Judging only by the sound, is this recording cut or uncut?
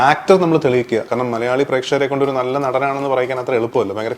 cut